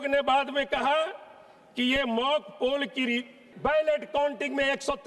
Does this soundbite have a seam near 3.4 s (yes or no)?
yes